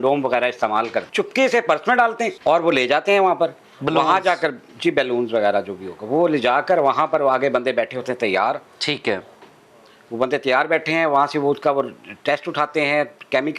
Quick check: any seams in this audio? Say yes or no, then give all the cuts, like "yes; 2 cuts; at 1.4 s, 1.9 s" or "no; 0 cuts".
no; 0 cuts